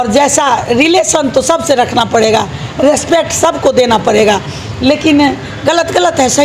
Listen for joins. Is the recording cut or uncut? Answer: uncut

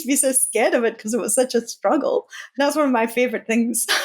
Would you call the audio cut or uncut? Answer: cut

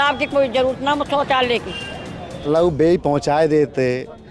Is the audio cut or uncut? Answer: cut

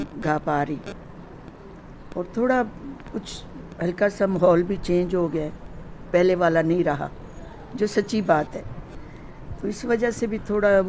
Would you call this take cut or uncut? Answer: uncut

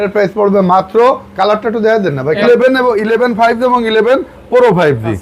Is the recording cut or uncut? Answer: cut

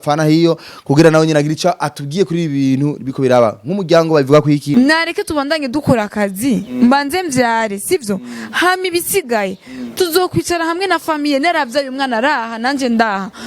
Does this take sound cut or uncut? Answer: cut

